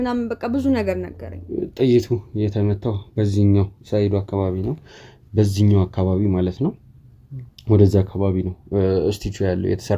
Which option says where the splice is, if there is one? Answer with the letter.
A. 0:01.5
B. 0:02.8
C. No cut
A